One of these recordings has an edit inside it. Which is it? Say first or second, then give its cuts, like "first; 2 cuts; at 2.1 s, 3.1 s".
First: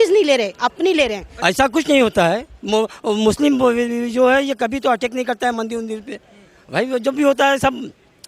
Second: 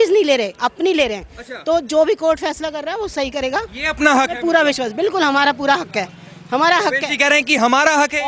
first; 1 cut; at 1.3 s